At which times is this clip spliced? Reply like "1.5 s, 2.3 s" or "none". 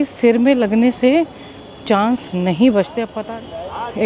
3.1 s